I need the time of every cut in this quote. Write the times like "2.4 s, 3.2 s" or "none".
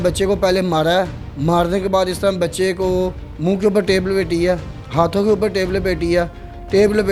none

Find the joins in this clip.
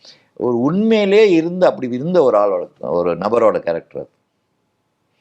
none

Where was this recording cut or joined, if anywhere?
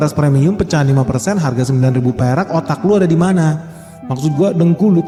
none

